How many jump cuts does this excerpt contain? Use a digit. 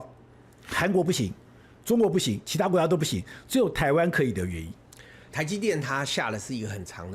1